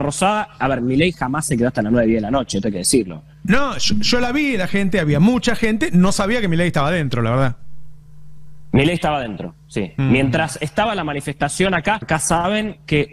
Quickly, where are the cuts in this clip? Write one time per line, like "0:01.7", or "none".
0:12.0